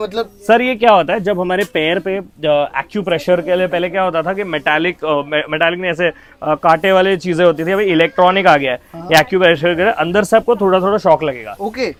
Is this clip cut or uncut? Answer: uncut